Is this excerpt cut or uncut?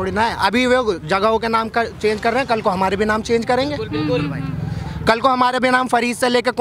uncut